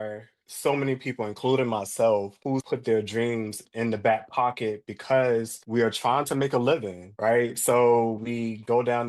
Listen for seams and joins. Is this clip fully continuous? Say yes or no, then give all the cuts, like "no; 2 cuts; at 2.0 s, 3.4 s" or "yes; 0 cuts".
no; 3 cuts; at 2.5 s, 3.6 s, 5.6 s